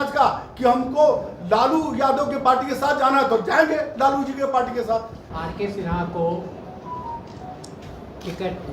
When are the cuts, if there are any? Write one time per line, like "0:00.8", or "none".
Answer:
0:05.2